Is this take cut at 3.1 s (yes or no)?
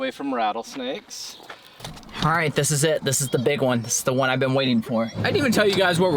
no